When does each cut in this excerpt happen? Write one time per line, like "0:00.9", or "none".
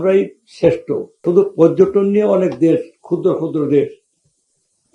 0:01.2